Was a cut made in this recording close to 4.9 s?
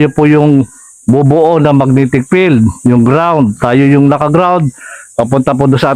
no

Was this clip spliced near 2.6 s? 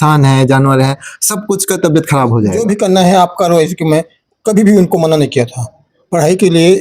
yes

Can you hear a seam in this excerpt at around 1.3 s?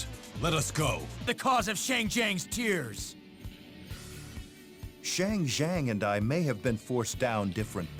yes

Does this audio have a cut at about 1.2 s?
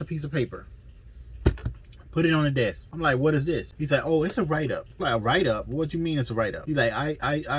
no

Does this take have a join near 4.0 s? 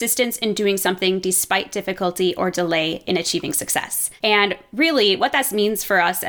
yes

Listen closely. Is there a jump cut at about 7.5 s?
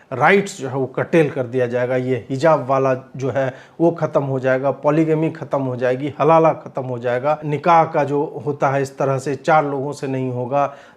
yes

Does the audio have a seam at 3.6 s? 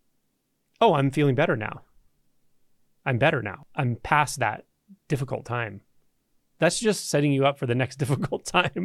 yes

